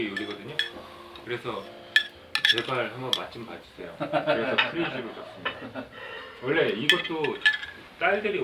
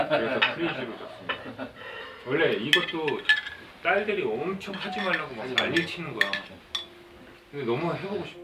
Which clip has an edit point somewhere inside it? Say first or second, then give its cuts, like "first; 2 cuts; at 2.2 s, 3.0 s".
first; 1 cut; at 1.1 s